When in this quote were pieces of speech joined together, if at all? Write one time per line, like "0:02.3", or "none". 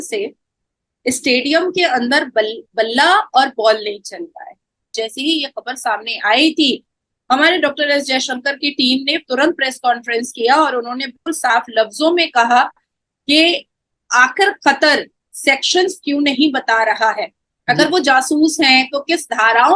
0:04.9